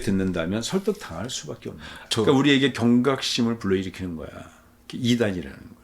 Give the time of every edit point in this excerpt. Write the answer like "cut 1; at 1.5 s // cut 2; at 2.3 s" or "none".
cut 1; at 2.1 s